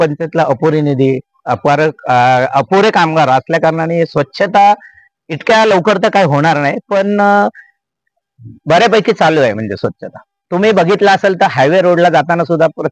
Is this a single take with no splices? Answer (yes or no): yes